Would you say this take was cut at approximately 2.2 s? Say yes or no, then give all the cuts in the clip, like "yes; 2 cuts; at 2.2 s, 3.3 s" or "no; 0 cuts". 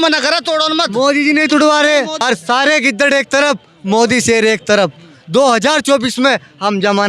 yes; 1 cut; at 2.2 s